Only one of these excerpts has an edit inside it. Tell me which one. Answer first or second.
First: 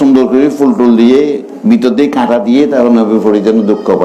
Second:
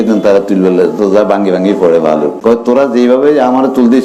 second